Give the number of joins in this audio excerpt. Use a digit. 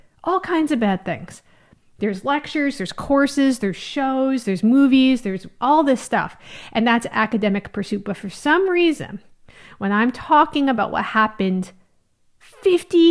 0